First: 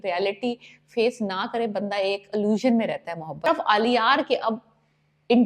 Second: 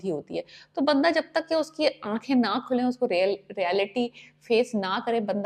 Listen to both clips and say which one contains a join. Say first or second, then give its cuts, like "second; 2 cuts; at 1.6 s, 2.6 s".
first; 1 cut; at 3.5 s